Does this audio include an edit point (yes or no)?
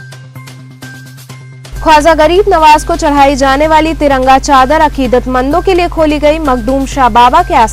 yes